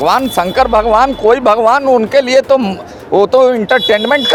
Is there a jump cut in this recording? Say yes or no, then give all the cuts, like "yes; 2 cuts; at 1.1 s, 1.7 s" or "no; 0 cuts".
no; 0 cuts